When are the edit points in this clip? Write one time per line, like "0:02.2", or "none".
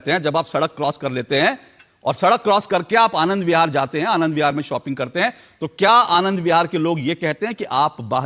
none